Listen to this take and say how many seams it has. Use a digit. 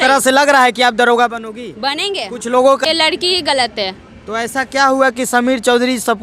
1